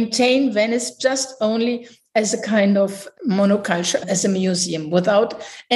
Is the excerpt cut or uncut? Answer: uncut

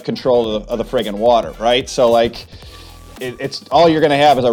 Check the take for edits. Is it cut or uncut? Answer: cut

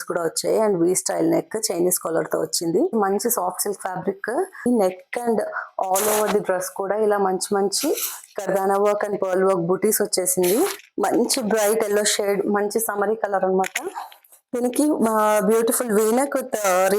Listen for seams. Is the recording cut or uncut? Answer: cut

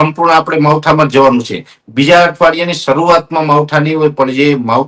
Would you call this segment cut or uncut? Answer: uncut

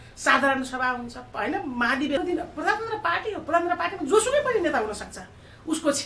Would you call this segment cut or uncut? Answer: cut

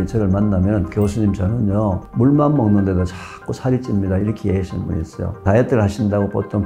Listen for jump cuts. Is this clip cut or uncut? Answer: cut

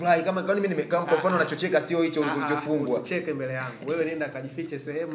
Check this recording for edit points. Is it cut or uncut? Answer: uncut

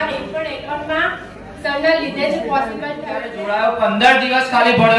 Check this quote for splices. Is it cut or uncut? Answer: cut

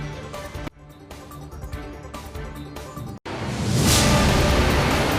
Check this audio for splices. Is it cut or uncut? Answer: uncut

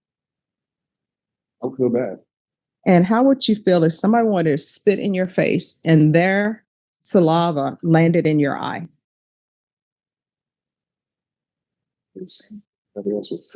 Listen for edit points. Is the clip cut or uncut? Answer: uncut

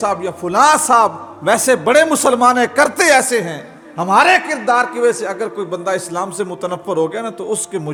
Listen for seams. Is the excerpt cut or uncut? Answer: uncut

